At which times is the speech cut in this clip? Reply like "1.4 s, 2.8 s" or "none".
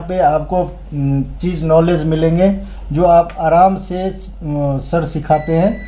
none